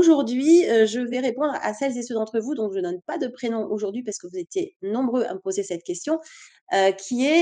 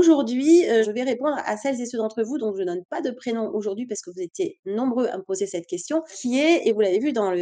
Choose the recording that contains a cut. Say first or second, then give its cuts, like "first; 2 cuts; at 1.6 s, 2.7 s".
second; 2 cuts; at 0.9 s, 6.2 s